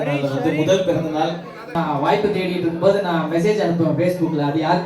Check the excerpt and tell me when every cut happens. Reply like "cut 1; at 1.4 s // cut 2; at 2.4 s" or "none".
cut 1; at 1.7 s